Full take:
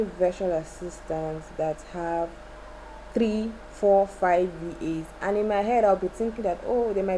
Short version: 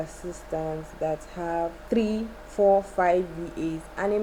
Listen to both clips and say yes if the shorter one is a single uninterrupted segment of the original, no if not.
no